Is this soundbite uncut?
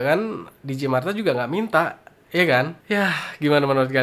yes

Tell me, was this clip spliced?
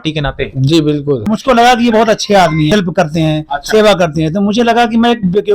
yes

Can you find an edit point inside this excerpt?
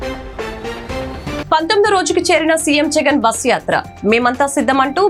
no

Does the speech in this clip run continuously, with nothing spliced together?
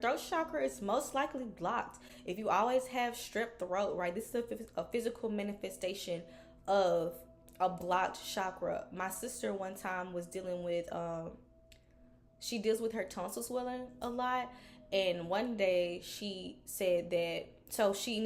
yes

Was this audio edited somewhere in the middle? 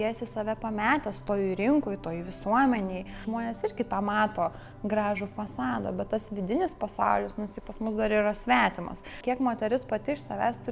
yes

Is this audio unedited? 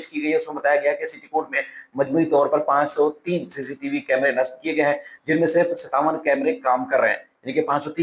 yes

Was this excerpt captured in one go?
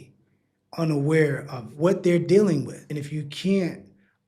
no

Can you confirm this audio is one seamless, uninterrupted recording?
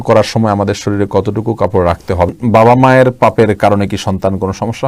no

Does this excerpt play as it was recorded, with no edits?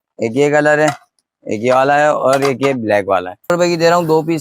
no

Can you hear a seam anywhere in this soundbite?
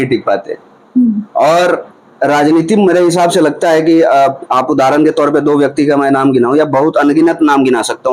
no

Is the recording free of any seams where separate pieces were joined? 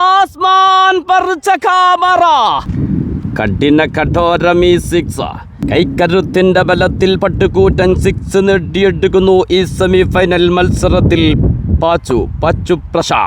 no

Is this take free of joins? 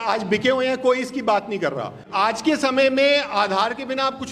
no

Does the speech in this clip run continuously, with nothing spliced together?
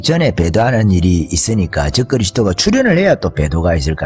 yes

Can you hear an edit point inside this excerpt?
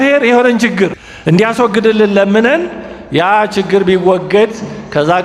yes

